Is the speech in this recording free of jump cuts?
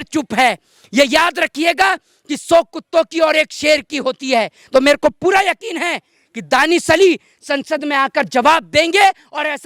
yes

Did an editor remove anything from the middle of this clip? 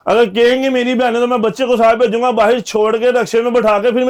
no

